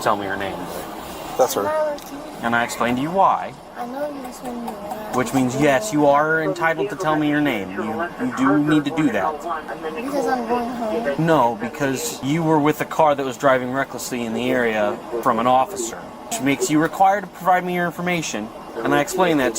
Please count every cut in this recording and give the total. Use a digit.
8